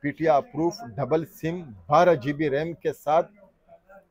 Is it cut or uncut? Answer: uncut